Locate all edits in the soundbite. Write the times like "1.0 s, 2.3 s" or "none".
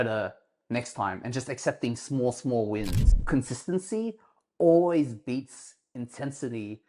3.2 s